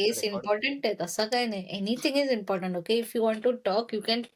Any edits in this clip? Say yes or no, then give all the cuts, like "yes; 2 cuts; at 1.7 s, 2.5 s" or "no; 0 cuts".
no; 0 cuts